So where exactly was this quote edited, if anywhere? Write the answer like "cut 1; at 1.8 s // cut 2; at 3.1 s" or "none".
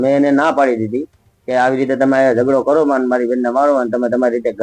none